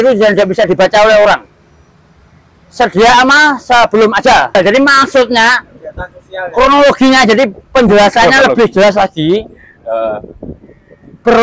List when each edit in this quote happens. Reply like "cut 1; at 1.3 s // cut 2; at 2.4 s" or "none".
cut 1; at 4.5 s